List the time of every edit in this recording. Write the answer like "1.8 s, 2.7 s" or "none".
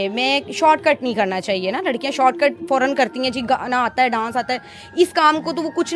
none